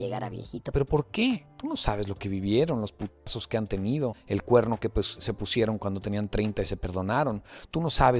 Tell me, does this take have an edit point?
yes; 2 cuts; at 1.5 s, 4.2 s

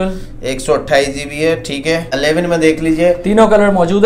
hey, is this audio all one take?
no; 1 cut; at 2.1 s

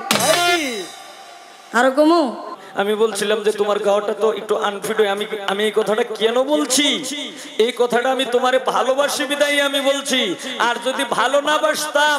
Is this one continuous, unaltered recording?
no; 1 cut; at 2.6 s

